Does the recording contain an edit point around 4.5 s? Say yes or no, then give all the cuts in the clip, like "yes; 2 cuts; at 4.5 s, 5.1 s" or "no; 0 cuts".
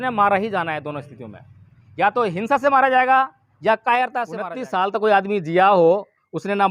yes; 1 cut; at 4.5 s